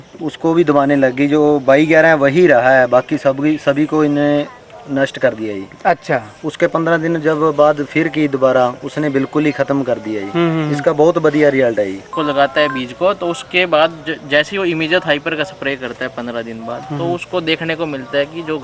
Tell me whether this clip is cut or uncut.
cut